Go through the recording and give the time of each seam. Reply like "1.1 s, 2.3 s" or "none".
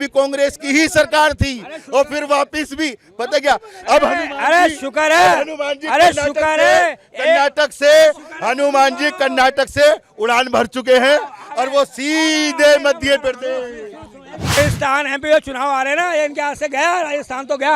14.6 s